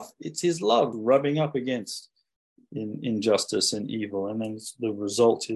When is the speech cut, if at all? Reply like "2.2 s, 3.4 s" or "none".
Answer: 0.9 s